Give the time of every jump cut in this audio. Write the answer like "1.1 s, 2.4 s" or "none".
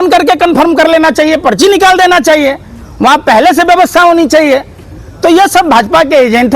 none